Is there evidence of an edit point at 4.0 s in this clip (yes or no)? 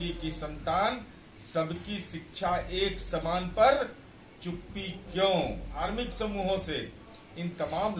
no